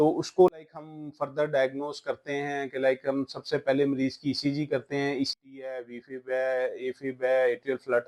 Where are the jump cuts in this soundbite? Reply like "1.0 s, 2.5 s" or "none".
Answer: 5.3 s